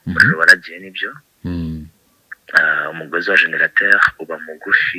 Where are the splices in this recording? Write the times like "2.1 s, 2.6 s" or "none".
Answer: none